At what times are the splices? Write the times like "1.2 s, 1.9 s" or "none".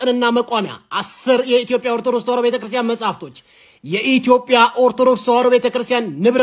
none